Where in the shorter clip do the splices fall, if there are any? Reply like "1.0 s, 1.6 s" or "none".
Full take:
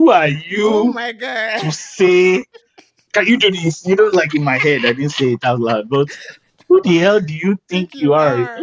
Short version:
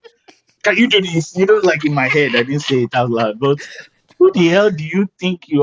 none